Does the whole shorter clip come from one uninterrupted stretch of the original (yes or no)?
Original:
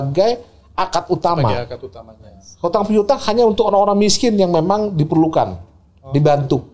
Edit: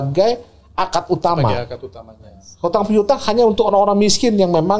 yes